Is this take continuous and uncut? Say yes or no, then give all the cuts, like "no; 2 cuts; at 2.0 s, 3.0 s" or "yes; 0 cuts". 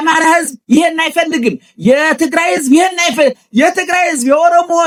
yes; 0 cuts